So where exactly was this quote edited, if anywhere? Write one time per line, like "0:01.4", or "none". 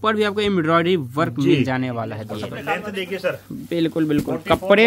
0:02.6